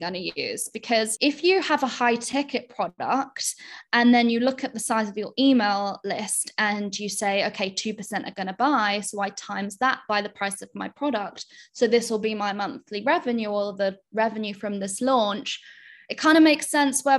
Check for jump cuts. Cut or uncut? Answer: cut